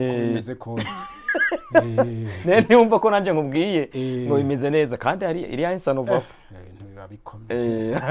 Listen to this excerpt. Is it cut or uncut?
uncut